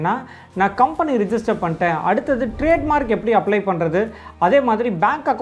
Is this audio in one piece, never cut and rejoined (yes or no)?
yes